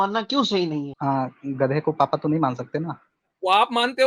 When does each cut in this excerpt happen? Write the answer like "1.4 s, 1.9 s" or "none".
0.9 s